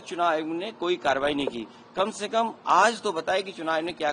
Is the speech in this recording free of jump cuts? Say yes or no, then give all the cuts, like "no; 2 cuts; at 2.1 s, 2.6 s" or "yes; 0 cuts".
yes; 0 cuts